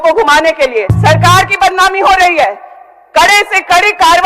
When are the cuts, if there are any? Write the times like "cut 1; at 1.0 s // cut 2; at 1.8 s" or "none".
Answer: cut 1; at 0.9 s